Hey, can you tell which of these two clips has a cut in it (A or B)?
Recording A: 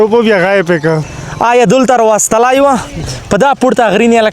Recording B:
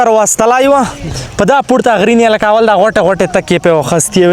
A